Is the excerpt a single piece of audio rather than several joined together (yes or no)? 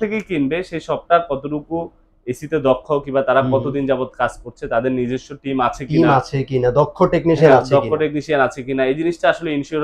yes